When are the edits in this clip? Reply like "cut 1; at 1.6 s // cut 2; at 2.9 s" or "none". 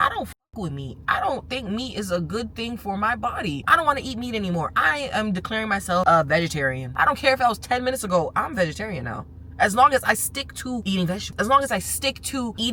cut 1; at 3.6 s // cut 2; at 6.9 s